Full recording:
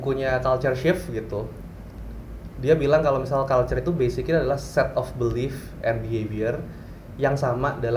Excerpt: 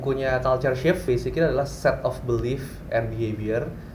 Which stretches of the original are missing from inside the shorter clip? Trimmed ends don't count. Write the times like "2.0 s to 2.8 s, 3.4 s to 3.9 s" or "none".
1.0 s to 4.0 s